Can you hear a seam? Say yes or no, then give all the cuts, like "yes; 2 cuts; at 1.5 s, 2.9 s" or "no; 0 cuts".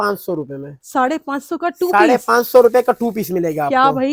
no; 0 cuts